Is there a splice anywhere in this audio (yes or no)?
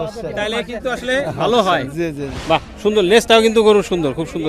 yes